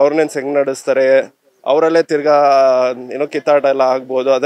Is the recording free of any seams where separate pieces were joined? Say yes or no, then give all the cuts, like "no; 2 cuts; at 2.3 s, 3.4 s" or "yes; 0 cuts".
yes; 0 cuts